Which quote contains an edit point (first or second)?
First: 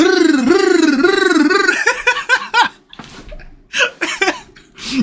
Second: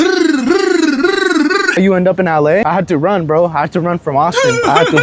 second